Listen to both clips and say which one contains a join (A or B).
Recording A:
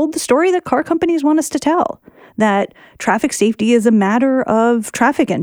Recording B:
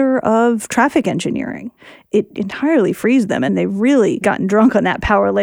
B